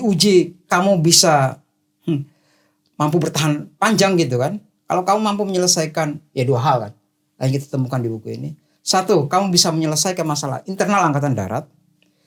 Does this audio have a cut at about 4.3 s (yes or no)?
no